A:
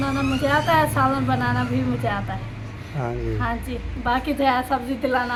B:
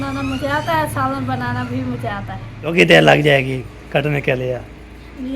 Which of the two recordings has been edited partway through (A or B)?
B